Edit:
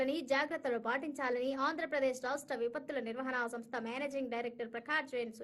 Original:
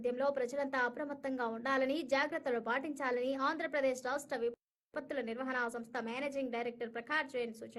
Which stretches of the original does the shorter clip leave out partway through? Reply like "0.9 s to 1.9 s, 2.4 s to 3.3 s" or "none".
4.6 s to 5.0 s

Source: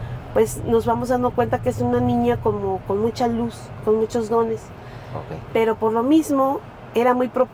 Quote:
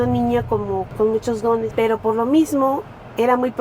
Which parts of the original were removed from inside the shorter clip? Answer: 2.8 s to 3.8 s, 4.6 s to 5.5 s

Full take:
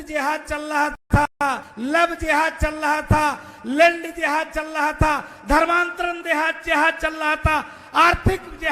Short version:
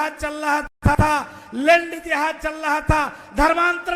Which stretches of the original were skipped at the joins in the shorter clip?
1.2 s to 3.1 s

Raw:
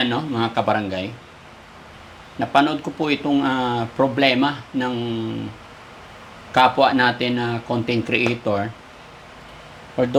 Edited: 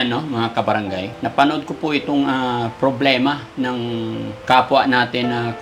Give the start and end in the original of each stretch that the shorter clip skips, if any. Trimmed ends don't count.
1.1 s to 2.3 s, 5.5 s to 6.4 s

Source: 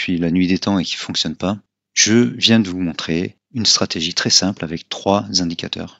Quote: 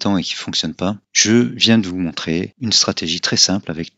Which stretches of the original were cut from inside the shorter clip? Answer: 1.7 s to 1.9 s, 3.3 s to 3.5 s

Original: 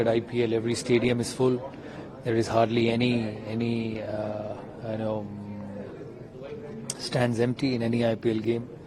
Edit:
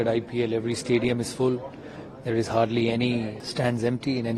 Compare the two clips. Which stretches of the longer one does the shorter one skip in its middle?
3.4 s to 7.0 s

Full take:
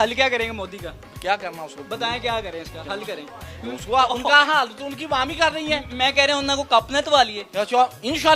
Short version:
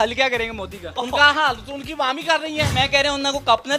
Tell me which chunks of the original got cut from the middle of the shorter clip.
1.0 s to 4.1 s, 5.8 s to 5.9 s

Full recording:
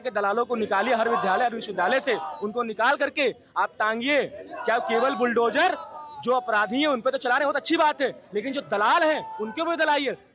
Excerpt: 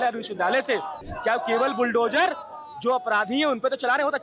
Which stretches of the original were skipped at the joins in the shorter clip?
2.4 s to 4.4 s

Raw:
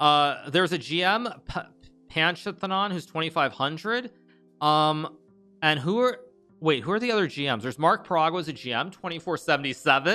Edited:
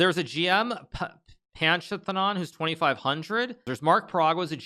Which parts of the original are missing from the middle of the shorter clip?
4.2 s to 7.7 s

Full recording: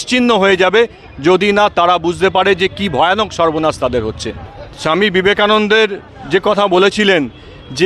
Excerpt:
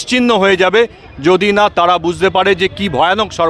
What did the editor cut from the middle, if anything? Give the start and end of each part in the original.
none

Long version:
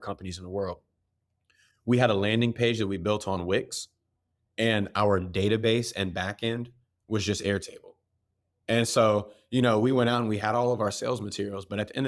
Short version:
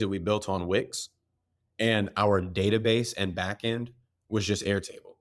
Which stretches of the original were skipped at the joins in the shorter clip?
none

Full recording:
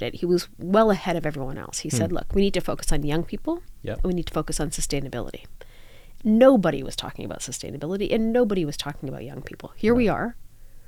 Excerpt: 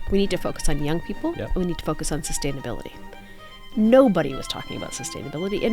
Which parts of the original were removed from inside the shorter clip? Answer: 3.7 s to 3.9 s

